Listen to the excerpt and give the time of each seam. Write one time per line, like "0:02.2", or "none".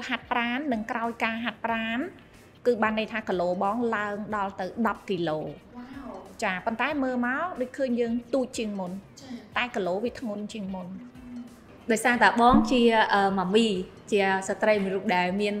none